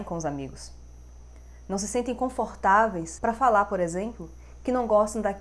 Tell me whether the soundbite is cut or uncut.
cut